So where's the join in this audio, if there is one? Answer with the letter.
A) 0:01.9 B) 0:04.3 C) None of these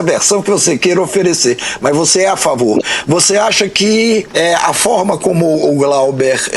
B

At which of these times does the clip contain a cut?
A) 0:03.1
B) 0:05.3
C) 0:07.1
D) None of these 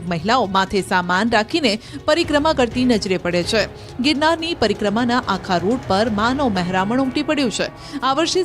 C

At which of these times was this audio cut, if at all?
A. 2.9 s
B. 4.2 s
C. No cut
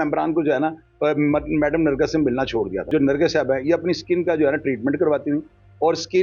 A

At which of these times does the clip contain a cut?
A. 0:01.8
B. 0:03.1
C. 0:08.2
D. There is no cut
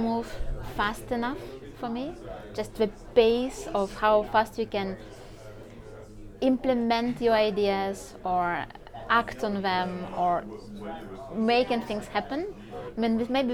D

